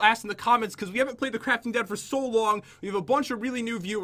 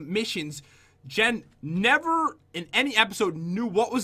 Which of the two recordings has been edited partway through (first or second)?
second